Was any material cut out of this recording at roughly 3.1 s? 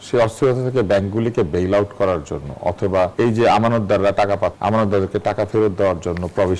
yes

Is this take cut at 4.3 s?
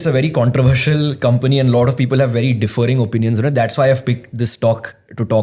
no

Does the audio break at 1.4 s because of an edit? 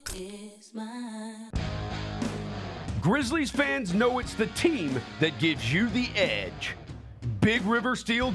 yes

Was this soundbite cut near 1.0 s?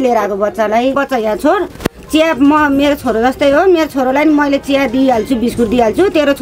yes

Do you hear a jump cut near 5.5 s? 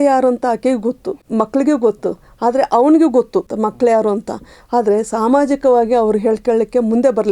no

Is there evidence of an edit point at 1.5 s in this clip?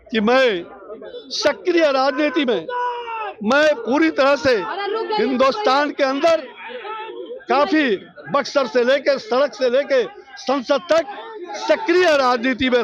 no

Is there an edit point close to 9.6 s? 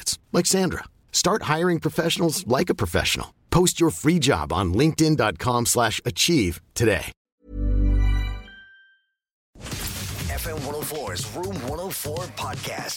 yes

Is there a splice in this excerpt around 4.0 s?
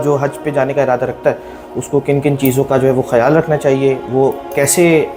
no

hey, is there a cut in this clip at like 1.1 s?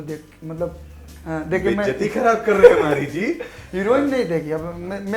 yes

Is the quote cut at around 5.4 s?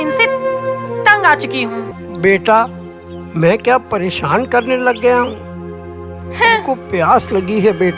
no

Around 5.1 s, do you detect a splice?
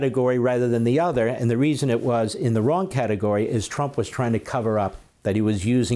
yes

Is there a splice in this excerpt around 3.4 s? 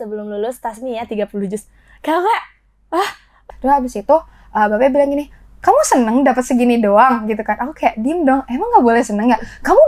yes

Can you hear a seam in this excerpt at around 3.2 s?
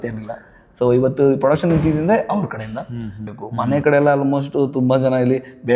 yes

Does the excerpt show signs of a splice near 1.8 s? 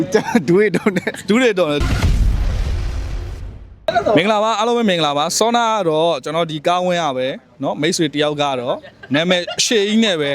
yes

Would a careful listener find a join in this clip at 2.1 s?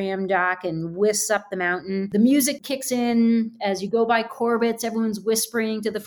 yes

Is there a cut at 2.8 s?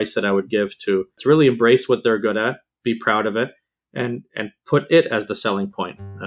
no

